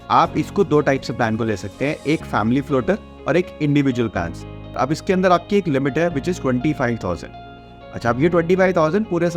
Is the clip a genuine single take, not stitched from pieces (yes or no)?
no